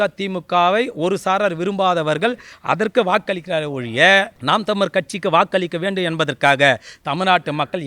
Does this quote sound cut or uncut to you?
cut